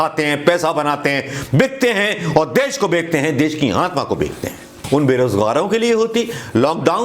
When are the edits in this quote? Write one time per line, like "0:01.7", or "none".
0:04.7